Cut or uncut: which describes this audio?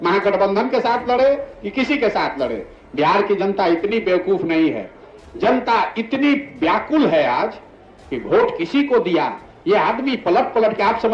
uncut